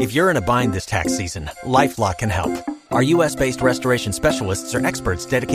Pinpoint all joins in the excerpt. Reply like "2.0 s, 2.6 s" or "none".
none